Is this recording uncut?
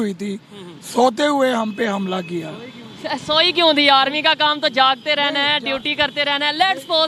yes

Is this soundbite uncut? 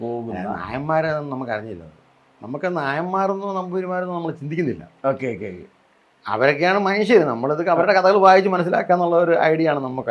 yes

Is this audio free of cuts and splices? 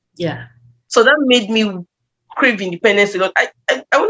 yes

